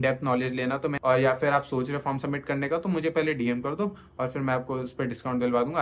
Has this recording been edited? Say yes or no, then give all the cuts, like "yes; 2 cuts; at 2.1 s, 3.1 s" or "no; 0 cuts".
yes; 1 cut; at 1.0 s